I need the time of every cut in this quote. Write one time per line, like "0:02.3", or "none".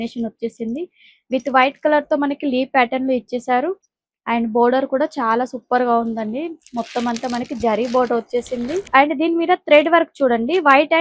0:08.8